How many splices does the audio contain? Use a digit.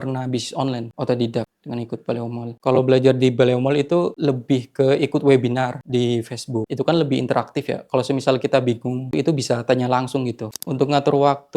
0